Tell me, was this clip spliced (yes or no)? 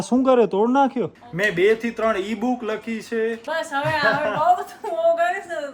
yes